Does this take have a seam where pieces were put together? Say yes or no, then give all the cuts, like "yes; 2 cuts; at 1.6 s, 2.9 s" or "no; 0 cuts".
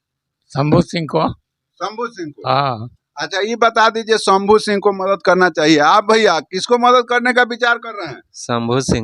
no; 0 cuts